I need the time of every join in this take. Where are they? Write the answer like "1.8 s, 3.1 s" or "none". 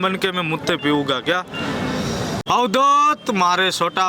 2.4 s